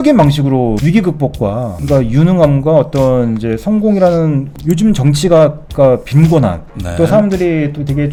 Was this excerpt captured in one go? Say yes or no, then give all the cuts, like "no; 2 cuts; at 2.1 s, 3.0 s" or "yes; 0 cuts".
yes; 0 cuts